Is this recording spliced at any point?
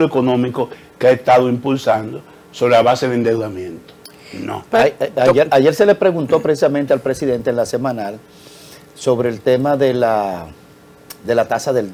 no; 0 cuts

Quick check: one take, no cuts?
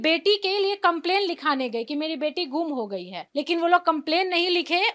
no; 1 cut; at 3.2 s

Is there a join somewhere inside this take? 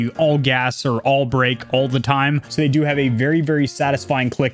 yes; 1 cut; at 2.4 s

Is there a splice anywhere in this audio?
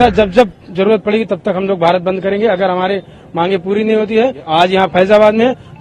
yes; 1 cut; at 4.4 s

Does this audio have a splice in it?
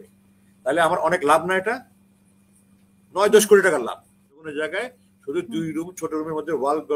yes; 1 cut; at 4.3 s

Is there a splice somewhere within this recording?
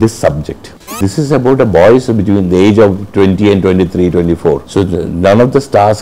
yes; 2 cuts; at 1.0 s, 4.6 s

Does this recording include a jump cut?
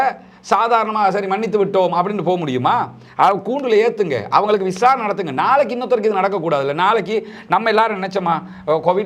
no; 0 cuts

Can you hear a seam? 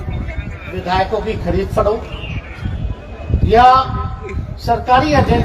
no; 0 cuts

